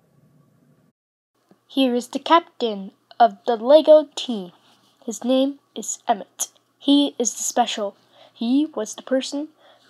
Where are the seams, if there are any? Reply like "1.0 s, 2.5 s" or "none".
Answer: 0.9 s